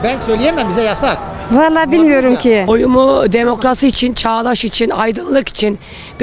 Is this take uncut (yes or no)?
no